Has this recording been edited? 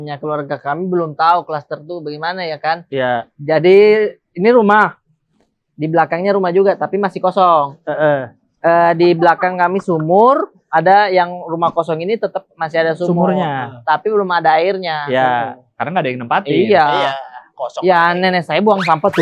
no; 0 cuts

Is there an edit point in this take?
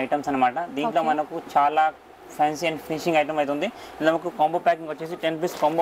no; 0 cuts

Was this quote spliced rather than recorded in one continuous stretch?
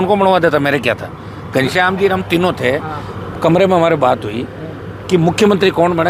no; 0 cuts

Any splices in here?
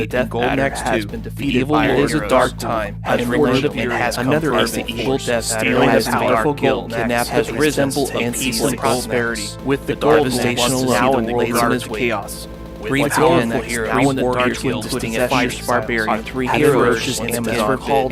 yes; 1 cut; at 15.5 s

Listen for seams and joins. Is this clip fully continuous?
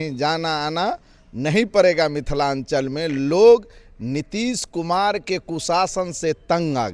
yes; 0 cuts

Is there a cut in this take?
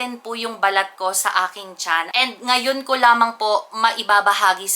yes; 1 cut; at 2.1 s

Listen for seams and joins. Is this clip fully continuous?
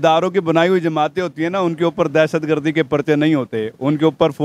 yes; 0 cuts

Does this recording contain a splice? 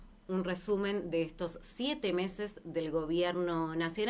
no; 0 cuts

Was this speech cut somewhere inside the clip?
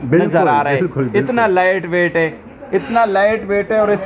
no; 0 cuts

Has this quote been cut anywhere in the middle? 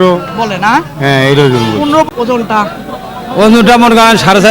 yes; 1 cut; at 2.1 s

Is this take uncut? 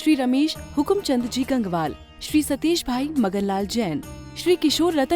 yes; 0 cuts

